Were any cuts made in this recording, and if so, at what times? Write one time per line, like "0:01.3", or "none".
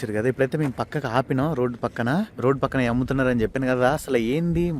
0:02.3